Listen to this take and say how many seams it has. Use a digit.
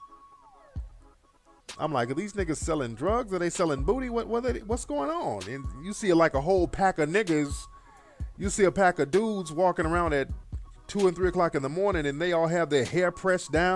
1